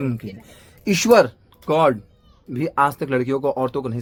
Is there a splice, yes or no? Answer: no